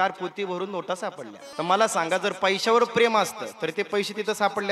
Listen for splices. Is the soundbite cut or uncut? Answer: cut